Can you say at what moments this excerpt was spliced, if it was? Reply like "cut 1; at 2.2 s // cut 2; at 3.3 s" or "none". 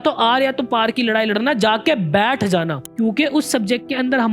cut 1; at 3.1 s